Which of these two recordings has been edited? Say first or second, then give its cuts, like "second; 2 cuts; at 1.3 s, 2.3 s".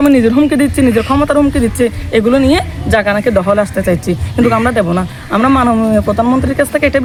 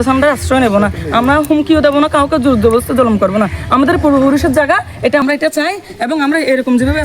second; 1 cut; at 5.2 s